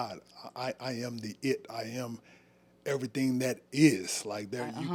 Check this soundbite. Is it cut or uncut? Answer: uncut